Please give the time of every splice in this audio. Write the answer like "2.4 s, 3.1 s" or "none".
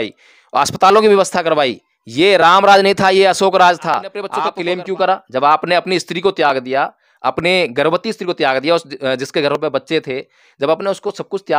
4.3 s